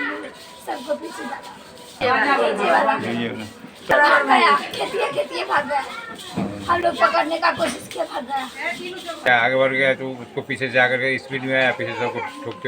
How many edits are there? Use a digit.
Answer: 3